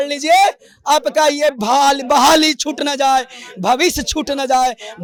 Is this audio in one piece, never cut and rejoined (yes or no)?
yes